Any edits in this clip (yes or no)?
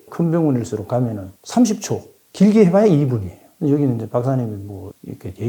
no